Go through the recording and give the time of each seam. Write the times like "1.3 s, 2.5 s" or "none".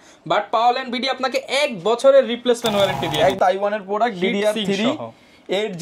3.4 s